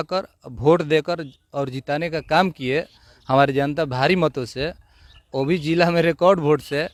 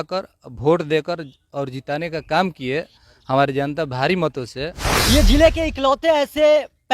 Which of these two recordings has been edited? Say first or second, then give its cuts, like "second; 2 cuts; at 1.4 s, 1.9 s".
second; 1 cut; at 4.9 s